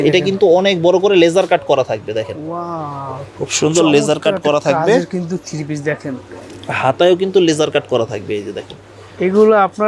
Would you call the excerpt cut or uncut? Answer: uncut